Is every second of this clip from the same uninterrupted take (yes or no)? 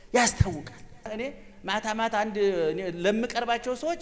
no